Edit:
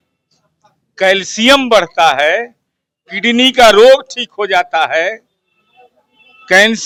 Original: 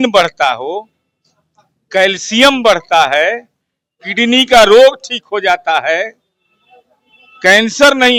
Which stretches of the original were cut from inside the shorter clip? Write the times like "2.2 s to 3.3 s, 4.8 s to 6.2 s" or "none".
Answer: none